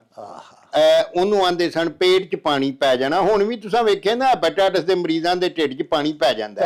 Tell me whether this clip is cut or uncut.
uncut